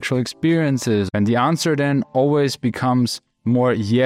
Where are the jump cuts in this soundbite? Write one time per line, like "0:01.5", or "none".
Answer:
0:01.1